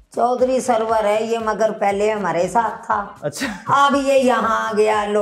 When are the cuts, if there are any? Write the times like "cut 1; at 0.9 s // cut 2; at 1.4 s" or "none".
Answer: none